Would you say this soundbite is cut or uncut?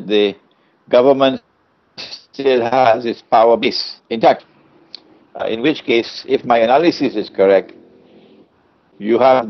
uncut